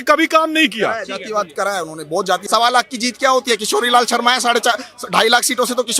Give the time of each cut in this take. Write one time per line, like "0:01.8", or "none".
0:02.4

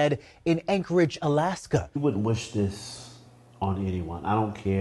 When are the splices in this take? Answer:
0:02.0

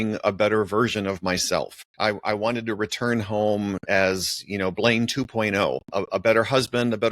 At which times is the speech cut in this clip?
0:01.8
0:05.9

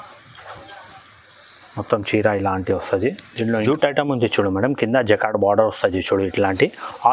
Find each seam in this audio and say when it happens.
0:03.6

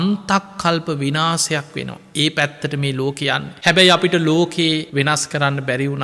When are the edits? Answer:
0:03.5
0:04.9

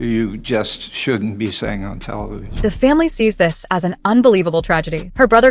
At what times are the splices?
none

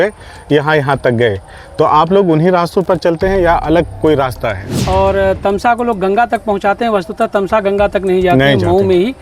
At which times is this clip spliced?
0:04.7

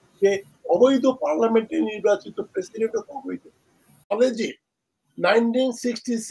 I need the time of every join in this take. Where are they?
0:04.1

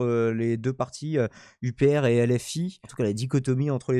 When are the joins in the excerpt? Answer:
0:02.8

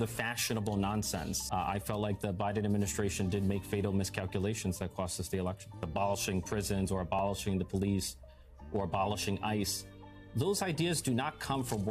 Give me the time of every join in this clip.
0:01.4
0:05.8

